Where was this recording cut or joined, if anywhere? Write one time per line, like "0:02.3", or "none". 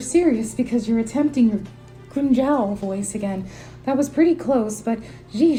none